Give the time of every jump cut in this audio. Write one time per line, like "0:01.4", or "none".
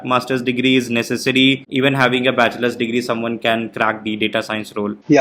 none

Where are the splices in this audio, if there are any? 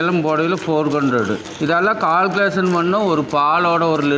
0:01.5

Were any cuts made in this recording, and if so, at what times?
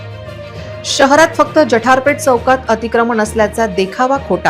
0:01.0

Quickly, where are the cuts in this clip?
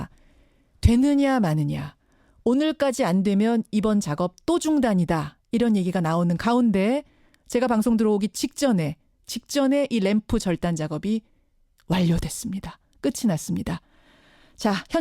0:01.3

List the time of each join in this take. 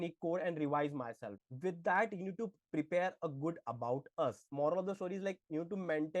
0:01.4
0:04.5

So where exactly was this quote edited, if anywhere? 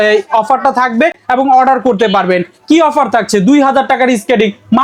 none

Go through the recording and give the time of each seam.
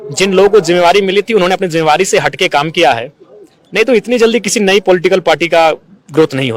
none

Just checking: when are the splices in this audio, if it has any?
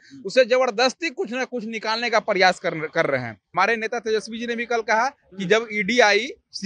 0:03.4

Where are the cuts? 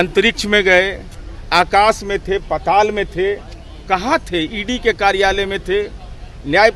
none

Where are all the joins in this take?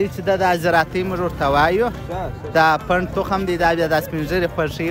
none

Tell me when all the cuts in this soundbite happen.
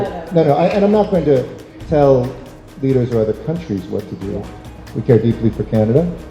0:04.8

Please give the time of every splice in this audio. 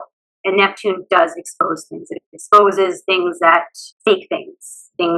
0:03.9

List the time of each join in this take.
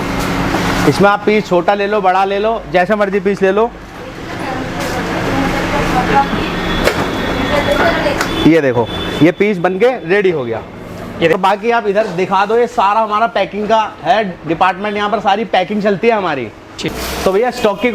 0:11.3
0:16.9

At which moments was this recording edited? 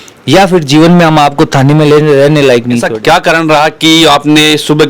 0:02.9

